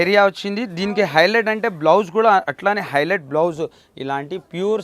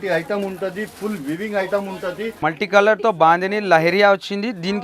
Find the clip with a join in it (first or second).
second